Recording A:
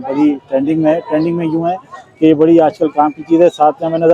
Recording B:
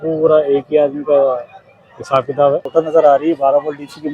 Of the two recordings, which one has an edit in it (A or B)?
B